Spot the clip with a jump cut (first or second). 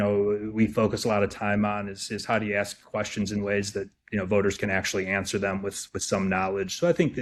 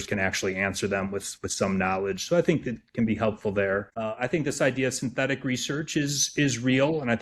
second